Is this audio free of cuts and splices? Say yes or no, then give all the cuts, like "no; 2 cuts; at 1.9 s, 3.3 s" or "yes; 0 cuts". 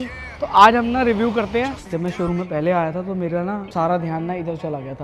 no; 2 cuts; at 1.8 s, 3.7 s